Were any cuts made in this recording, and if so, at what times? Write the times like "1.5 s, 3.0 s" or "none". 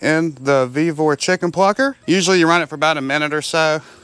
2.0 s